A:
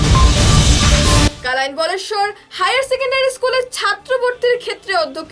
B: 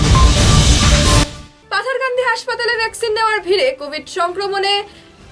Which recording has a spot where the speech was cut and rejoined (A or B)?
B